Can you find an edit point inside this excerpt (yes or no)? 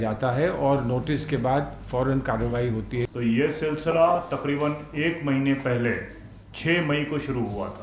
yes